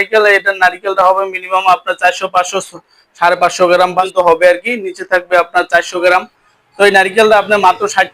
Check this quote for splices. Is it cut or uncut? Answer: cut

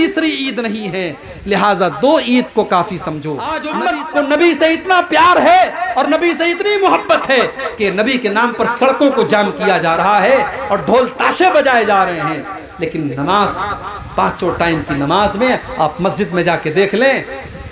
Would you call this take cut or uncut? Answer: cut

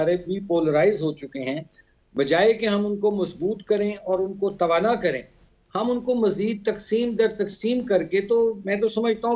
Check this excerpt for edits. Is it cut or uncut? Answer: uncut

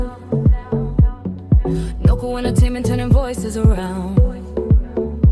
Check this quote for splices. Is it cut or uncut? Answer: uncut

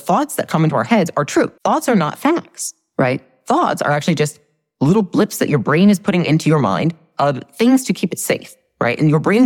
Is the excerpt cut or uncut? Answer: cut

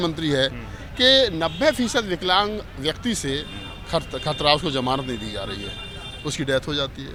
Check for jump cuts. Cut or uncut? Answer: uncut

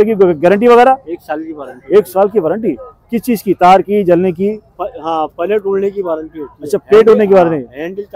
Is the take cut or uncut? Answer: uncut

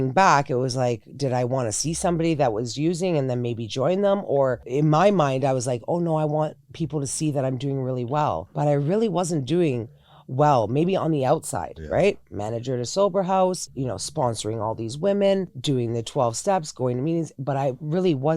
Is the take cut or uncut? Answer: cut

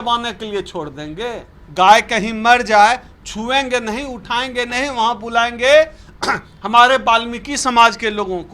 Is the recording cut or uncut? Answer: cut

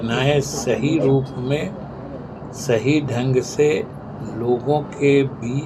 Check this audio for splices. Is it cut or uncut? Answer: uncut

